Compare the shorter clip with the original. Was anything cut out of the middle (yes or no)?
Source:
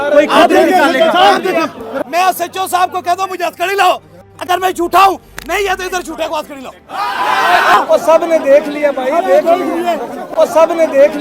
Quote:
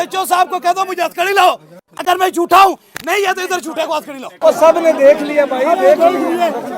yes